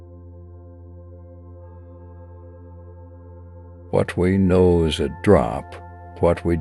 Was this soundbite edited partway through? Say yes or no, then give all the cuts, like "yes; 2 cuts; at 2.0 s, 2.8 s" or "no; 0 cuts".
no; 0 cuts